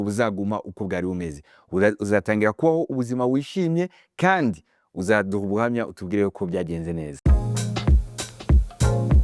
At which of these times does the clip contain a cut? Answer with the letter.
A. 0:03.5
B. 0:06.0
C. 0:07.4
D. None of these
C